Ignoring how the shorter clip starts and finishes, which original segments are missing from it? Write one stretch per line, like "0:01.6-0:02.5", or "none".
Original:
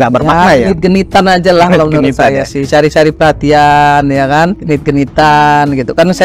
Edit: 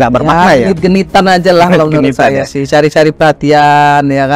none